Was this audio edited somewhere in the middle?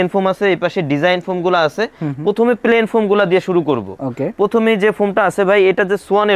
no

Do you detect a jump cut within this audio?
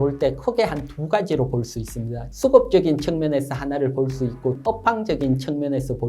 yes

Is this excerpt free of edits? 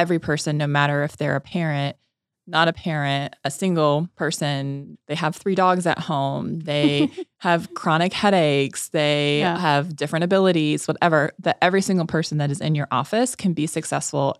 no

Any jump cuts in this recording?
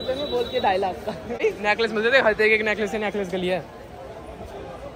yes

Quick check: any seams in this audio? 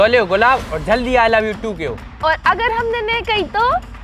yes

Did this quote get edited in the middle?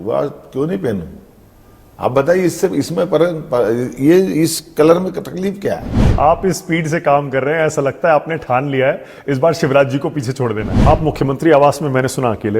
yes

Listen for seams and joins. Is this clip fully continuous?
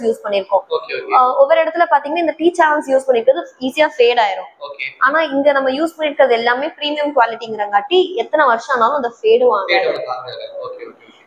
yes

